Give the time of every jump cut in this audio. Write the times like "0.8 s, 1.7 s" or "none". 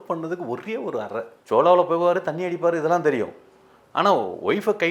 1.3 s